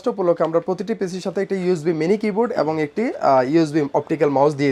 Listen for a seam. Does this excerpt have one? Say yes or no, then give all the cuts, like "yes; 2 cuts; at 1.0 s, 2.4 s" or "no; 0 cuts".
no; 0 cuts